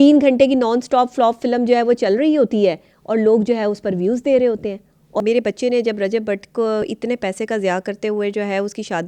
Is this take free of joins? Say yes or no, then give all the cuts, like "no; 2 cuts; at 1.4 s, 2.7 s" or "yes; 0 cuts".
no; 2 cuts; at 5.0 s, 6.9 s